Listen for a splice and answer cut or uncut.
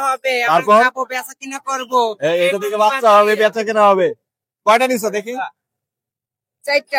uncut